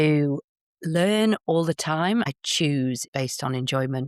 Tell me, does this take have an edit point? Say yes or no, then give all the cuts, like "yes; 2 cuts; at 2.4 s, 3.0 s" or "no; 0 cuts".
yes; 1 cut; at 2.6 s